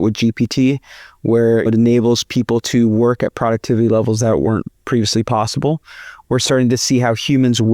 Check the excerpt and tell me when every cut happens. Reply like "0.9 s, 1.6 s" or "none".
1.7 s